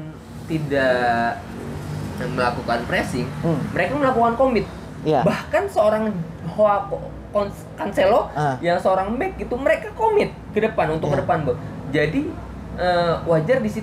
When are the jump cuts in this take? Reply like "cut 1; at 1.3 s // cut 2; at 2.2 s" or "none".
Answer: none